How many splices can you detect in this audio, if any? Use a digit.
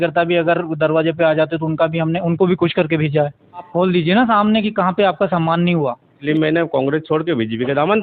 2